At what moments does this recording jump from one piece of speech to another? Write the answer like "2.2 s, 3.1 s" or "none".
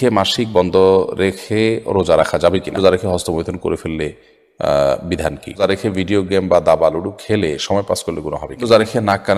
2.8 s, 5.6 s, 8.6 s